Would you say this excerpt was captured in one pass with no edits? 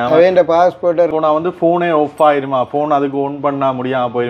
no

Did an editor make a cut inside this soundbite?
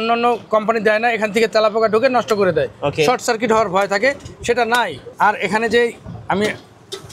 no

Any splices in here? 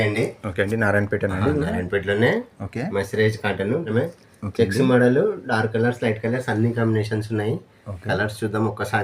yes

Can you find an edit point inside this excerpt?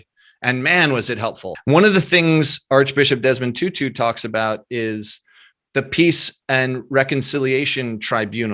yes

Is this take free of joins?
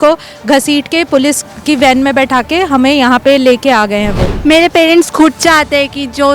no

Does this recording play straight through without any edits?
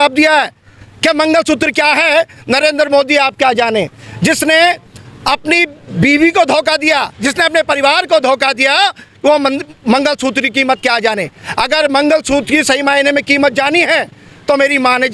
yes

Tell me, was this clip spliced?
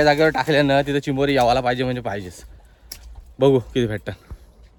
no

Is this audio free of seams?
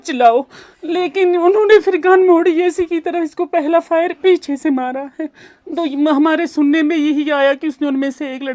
yes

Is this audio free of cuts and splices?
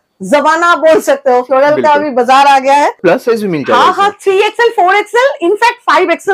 no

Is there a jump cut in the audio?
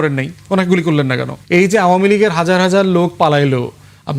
yes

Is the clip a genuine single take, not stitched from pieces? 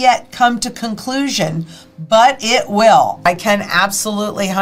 no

